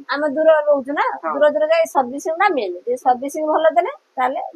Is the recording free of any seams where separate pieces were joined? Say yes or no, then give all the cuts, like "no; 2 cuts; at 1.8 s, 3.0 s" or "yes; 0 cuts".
yes; 0 cuts